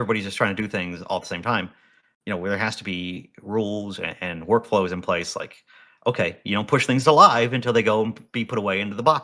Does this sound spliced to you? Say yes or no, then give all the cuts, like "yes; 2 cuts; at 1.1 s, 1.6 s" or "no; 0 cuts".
no; 0 cuts